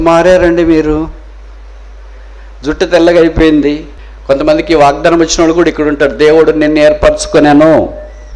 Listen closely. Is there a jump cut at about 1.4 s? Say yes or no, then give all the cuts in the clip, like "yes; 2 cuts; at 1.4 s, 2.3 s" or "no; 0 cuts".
no; 1 cut; at 3.9 s